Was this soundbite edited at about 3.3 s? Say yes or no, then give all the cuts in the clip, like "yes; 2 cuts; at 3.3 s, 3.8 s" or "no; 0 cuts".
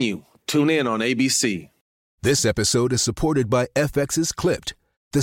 no; 1 cut; at 1.8 s